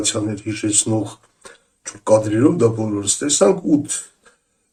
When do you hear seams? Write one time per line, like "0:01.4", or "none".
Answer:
none